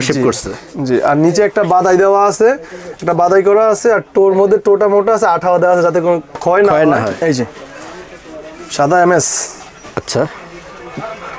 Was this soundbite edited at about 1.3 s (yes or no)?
no